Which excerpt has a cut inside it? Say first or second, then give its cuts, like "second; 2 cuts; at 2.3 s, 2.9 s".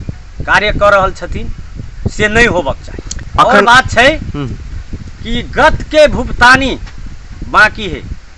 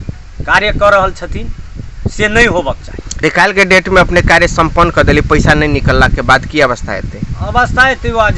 second; 1 cut; at 3.2 s